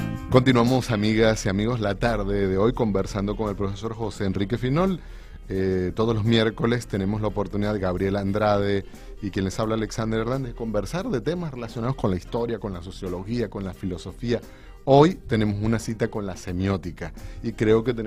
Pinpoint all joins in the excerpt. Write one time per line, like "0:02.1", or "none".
none